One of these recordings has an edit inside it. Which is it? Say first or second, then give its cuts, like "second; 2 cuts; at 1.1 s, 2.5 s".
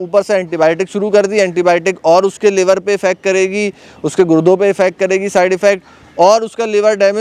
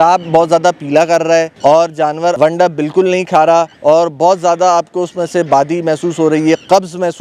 second; 3 cuts; at 1.5 s, 2.4 s, 3.7 s